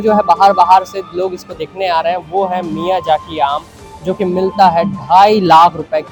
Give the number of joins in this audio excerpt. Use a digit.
0